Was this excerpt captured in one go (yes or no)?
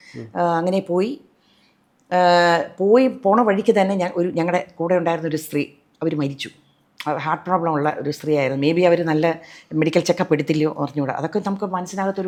yes